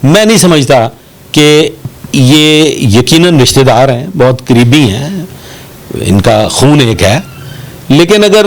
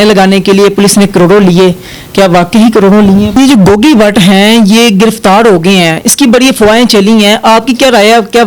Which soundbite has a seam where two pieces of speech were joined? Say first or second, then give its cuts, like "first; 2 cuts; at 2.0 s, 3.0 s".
second; 1 cut; at 3.3 s